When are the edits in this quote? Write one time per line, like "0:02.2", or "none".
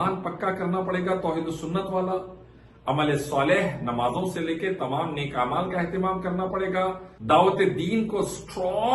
0:07.1